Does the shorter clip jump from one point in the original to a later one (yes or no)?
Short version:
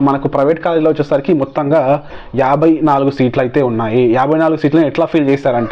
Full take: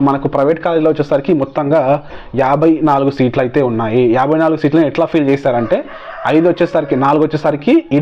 no